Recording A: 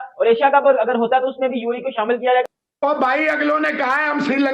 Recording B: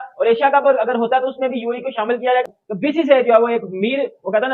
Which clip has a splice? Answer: A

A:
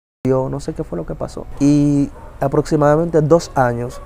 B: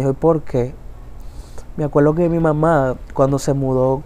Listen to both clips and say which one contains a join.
A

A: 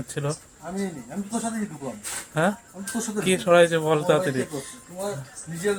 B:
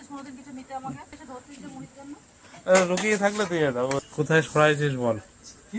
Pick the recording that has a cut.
B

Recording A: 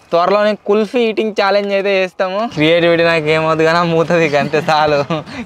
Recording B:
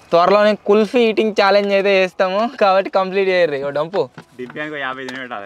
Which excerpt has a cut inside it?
A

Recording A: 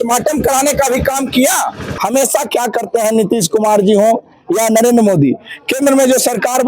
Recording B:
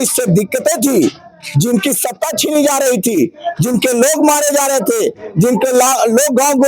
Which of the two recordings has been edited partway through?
A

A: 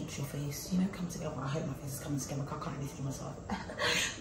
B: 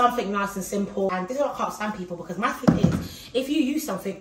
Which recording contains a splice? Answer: B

